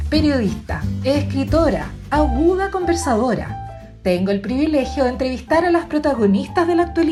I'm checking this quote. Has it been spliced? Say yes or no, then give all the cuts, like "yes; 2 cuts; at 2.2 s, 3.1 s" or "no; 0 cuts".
no; 0 cuts